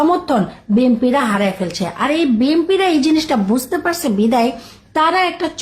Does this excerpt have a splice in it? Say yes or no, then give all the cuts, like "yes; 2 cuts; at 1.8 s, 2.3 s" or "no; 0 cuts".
no; 0 cuts